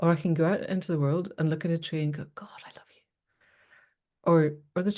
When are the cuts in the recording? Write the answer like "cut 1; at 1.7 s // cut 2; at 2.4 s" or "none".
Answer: none